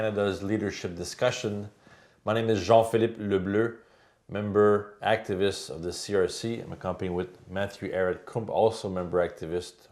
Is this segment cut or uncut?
uncut